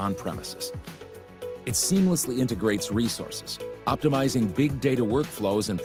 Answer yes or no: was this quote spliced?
no